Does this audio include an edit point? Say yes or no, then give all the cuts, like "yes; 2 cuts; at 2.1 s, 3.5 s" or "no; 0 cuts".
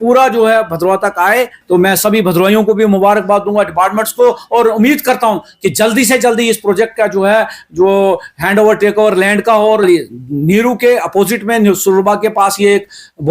yes; 2 cuts; at 1.6 s, 9.8 s